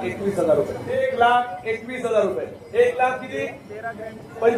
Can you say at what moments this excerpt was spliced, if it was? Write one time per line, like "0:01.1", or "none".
0:01.1